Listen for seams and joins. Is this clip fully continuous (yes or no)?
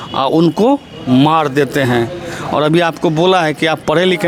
yes